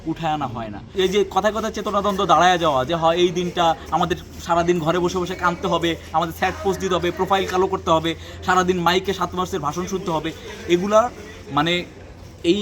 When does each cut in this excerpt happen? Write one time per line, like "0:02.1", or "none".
0:00.9